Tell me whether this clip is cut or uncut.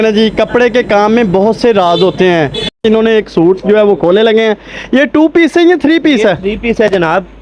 cut